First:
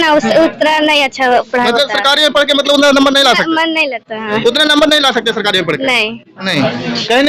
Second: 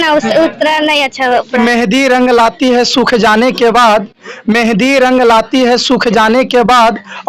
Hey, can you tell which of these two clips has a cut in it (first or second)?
second